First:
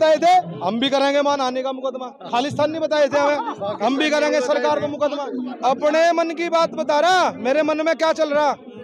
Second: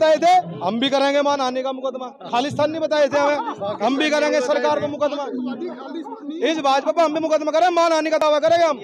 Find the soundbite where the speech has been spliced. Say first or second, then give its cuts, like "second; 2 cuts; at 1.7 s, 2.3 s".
first; 1 cut; at 5.5 s